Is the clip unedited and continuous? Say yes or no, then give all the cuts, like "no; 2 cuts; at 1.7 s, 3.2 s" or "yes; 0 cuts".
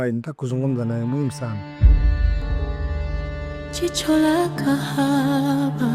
no; 2 cuts; at 1.5 s, 3.4 s